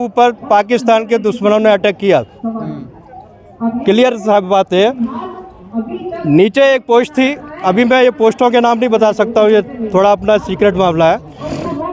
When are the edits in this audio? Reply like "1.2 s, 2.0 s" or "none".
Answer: none